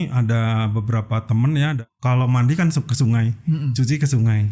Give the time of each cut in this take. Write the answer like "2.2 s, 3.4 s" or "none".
1.8 s